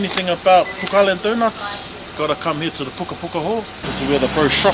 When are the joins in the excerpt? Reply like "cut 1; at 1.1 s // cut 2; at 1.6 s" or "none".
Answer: cut 1; at 3.8 s